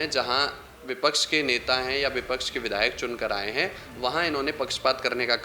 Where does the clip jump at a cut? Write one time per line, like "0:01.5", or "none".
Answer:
none